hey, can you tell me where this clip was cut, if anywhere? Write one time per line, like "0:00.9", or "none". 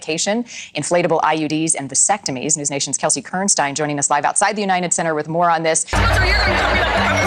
0:05.9